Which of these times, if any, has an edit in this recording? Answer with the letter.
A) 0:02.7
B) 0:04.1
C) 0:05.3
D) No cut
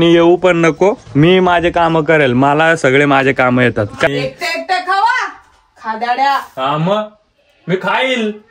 B